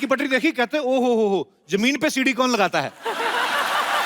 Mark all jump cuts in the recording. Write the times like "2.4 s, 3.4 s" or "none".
none